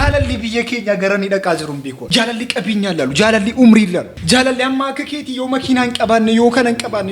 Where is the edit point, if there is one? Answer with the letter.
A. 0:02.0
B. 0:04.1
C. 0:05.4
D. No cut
A